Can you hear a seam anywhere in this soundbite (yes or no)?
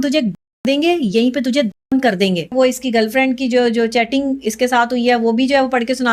yes